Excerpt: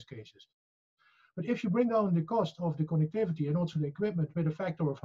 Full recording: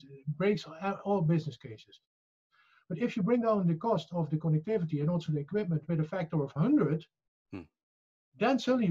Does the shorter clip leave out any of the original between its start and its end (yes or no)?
no